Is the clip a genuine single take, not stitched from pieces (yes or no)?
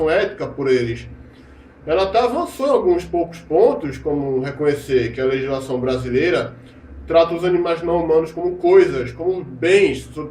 no